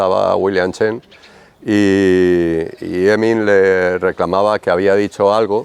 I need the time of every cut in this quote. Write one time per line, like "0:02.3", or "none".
none